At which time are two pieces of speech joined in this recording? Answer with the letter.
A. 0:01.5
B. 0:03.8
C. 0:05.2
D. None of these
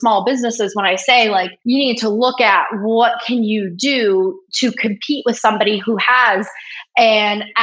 A